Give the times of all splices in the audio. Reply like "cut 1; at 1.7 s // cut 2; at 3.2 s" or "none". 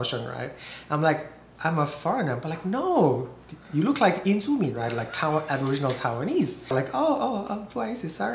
cut 1; at 6.7 s